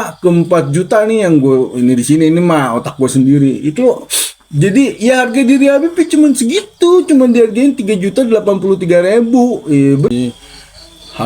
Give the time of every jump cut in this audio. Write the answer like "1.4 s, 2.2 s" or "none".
10.1 s